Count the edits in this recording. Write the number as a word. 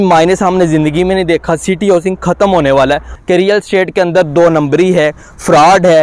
one